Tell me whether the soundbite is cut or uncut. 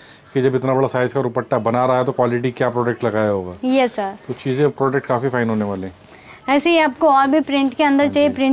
uncut